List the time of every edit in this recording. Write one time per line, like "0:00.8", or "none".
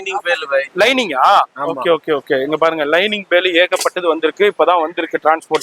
none